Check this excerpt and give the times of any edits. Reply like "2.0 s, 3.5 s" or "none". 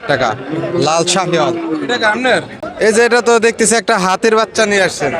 2.6 s